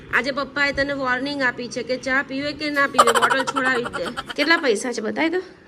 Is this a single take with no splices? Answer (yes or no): no